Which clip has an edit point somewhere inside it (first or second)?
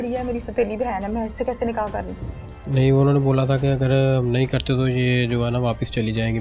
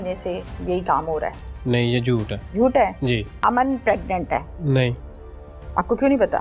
second